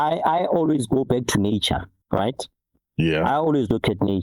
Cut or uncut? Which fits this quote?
cut